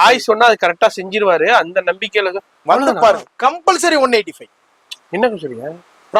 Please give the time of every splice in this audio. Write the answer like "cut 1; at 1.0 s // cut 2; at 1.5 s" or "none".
none